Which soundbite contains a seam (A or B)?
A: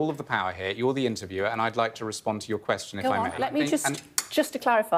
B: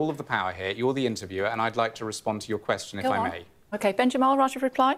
A